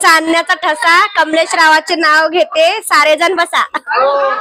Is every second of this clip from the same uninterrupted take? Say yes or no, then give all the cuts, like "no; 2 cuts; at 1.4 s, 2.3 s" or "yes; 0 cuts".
yes; 0 cuts